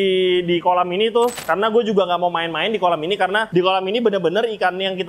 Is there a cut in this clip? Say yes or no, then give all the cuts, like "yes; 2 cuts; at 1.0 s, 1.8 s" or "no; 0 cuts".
yes; 2 cuts; at 1.4 s, 3.5 s